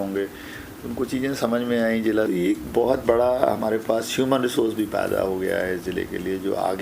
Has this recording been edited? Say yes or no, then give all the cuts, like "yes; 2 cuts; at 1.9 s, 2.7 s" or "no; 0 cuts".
yes; 1 cut; at 2.3 s